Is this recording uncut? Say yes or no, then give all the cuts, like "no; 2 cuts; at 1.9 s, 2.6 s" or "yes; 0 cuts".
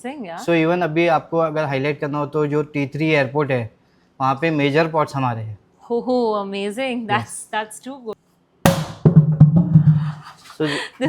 no; 1 cut; at 8.1 s